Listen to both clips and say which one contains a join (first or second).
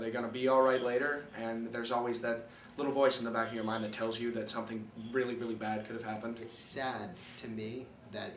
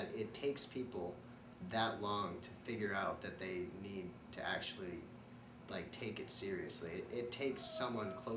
first